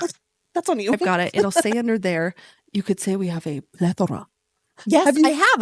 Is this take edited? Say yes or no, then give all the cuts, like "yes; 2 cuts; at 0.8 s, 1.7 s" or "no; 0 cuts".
yes; 1 cut; at 1.6 s